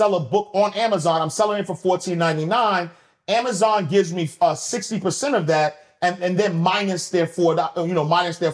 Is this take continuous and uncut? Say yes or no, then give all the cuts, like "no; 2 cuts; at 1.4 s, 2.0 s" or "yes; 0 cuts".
yes; 0 cuts